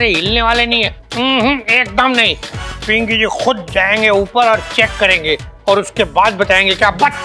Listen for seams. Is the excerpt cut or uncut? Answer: cut